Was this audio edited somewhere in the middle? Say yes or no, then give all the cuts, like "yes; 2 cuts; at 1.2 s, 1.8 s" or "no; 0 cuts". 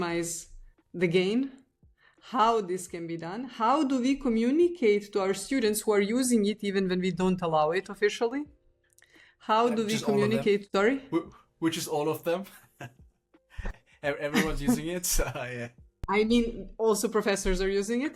yes; 1 cut; at 10.7 s